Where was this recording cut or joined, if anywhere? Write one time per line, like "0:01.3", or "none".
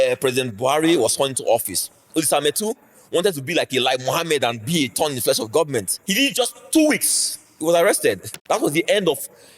0:02.0
0:06.0
0:08.3